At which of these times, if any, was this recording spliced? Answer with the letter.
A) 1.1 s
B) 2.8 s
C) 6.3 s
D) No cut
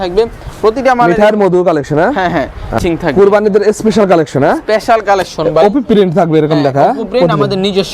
B